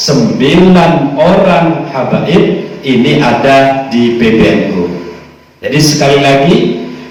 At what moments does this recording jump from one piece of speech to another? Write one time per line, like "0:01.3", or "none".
none